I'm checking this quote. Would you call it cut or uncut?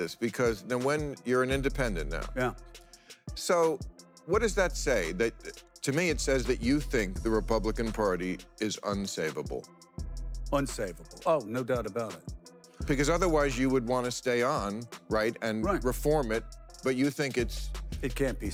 uncut